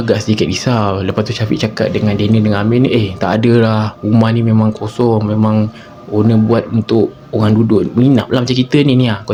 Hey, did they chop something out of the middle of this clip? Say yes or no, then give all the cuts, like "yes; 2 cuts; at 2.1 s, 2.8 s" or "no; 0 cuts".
no; 0 cuts